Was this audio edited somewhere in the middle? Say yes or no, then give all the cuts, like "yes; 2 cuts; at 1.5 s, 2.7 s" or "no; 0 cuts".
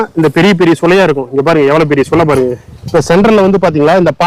yes; 1 cut; at 2.8 s